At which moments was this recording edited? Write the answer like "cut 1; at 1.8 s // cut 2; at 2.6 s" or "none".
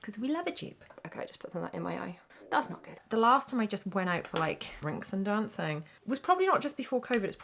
cut 1; at 0.9 s // cut 2; at 3.0 s // cut 3; at 4.7 s // cut 4; at 6.0 s